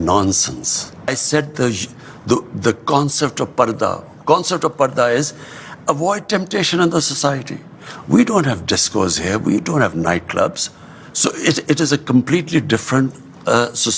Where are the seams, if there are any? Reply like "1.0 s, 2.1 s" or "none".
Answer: 1.1 s

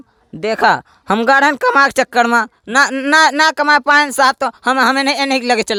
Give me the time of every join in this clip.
none

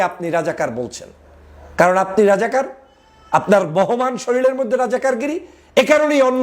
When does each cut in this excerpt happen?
none

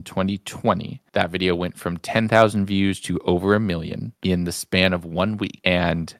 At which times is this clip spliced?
none

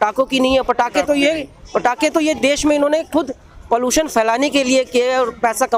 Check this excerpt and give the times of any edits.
none

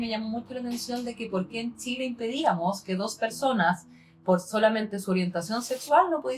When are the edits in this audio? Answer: none

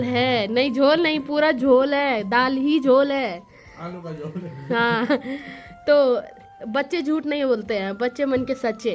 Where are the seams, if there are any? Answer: none

